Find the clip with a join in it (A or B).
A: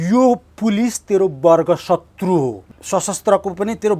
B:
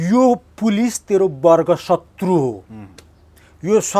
A